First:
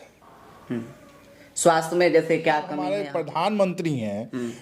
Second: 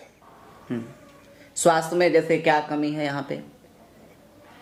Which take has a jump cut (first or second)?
first